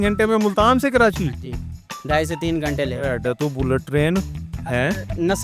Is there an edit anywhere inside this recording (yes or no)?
no